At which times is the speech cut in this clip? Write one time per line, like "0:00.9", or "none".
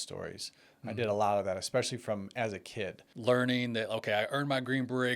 0:03.0